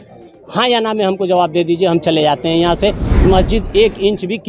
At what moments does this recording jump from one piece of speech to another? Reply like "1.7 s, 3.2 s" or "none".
3.2 s

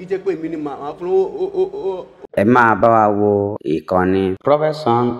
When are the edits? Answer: 2.1 s

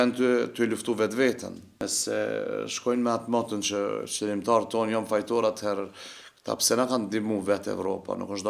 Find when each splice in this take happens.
1.7 s

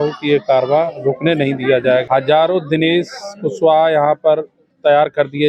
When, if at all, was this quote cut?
2.0 s

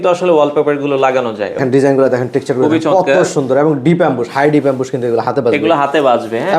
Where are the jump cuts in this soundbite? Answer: 1.6 s

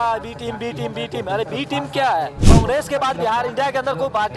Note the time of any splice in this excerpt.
2.4 s

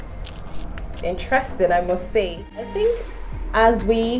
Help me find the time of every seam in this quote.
2.7 s

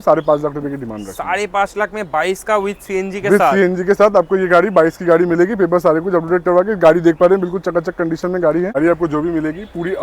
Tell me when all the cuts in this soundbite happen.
8.8 s

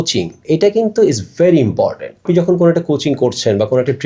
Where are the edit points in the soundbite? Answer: 2.2 s

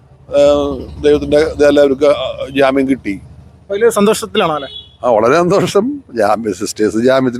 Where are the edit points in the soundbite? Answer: none

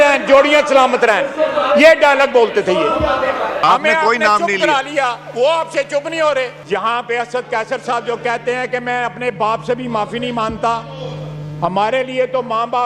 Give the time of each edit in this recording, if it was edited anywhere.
3.6 s, 6.6 s

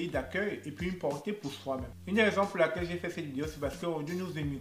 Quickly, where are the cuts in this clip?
1.9 s

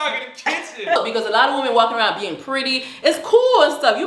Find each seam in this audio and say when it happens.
1.0 s

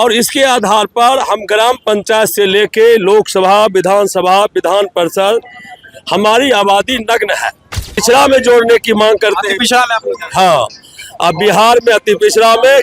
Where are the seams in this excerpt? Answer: 8.0 s

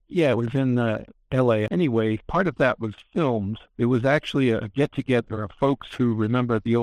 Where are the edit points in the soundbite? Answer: 1.7 s, 3.6 s

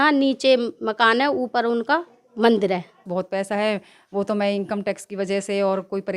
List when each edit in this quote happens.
3.1 s

